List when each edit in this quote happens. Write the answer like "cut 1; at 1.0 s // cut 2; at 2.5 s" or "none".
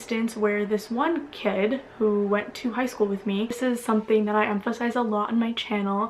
cut 1; at 3.5 s